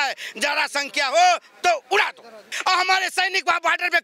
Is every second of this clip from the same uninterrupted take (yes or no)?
no